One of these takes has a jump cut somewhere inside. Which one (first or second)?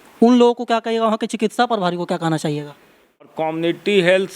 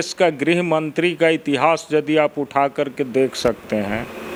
first